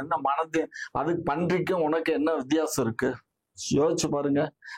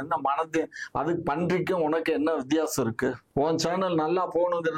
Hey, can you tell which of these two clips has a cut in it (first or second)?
second